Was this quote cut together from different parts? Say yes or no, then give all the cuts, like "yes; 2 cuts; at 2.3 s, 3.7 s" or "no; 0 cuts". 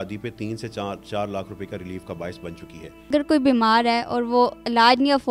yes; 1 cut; at 2.9 s